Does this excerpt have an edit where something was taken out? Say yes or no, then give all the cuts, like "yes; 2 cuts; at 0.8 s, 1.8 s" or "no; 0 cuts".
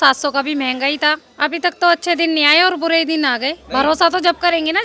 yes; 2 cuts; at 1.3 s, 3.6 s